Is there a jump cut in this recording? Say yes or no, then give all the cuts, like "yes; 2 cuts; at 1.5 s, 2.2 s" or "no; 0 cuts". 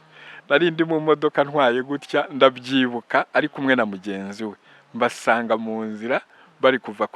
no; 0 cuts